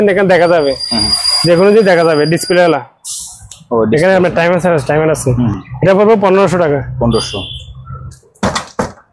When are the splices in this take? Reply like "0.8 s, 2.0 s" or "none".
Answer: none